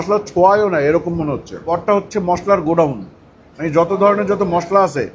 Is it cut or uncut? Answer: cut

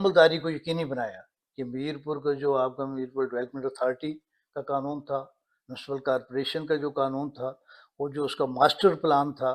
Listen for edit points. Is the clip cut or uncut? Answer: uncut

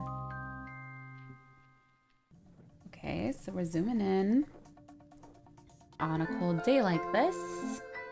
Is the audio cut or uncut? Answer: uncut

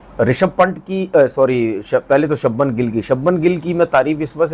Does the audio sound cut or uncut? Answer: uncut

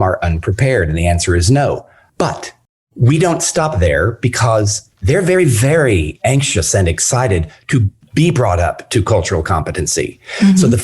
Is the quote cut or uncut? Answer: cut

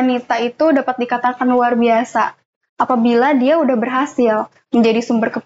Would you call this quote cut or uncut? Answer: uncut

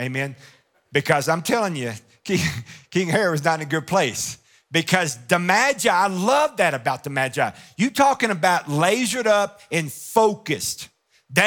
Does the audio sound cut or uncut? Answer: uncut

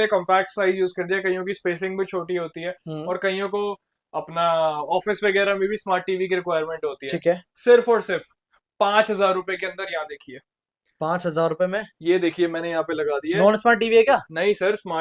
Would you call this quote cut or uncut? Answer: uncut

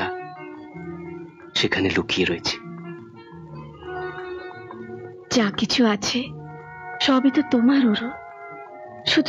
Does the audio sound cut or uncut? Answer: uncut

